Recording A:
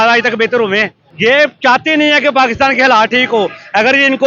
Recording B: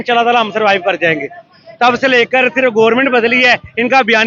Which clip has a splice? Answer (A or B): A